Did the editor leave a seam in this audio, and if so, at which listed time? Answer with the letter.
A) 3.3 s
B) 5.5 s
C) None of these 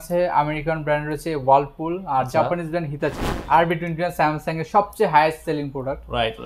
A